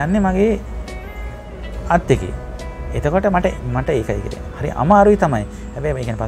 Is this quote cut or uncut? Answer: uncut